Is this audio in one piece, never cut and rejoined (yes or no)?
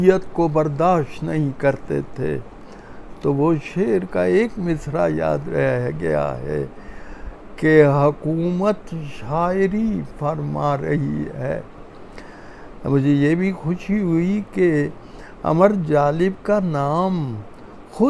yes